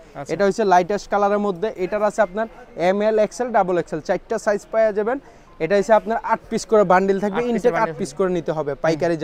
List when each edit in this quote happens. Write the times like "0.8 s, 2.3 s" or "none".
none